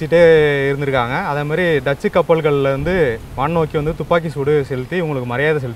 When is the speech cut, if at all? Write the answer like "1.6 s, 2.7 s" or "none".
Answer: none